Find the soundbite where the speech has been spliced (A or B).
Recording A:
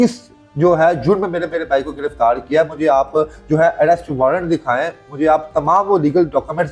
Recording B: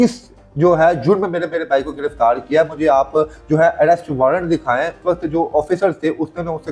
B